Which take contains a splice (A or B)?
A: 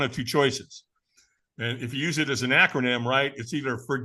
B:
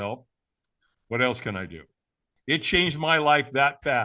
B